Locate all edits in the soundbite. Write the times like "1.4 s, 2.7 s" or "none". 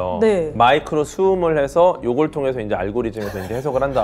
none